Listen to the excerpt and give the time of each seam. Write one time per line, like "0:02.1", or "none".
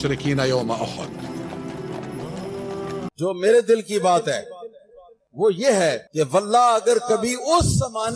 0:03.0